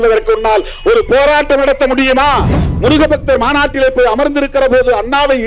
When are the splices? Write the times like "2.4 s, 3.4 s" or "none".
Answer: 2.6 s